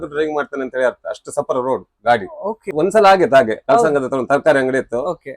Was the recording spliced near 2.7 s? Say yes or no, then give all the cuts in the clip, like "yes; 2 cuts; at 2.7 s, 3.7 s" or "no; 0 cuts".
yes; 1 cut; at 2.7 s